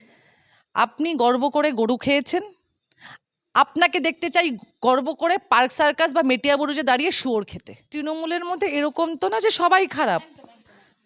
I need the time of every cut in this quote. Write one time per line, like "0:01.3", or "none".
0:07.9